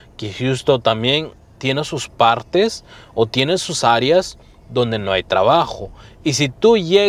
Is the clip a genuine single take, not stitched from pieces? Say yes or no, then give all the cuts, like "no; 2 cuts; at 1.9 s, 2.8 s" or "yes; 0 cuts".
yes; 0 cuts